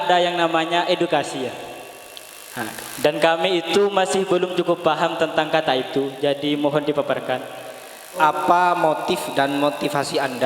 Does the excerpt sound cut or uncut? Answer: cut